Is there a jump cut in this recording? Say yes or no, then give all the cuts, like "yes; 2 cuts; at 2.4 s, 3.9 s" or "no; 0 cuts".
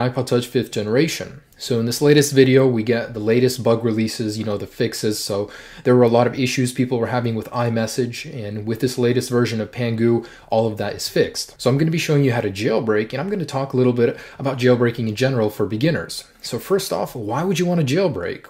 yes; 1 cut; at 5.6 s